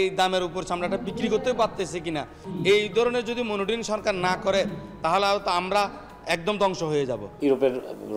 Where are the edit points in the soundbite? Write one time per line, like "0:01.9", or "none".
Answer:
0:02.4
0:07.2